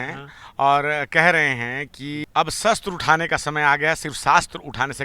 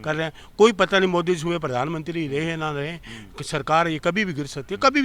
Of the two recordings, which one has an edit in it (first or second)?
first